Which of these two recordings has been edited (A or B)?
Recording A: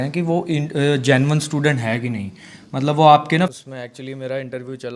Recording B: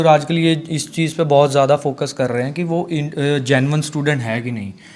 A